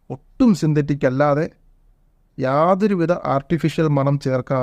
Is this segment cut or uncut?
uncut